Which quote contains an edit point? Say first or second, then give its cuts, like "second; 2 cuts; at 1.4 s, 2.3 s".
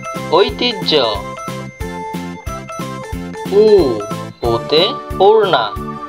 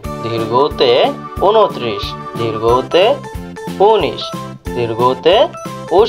first; 2 cuts; at 1.2 s, 3.1 s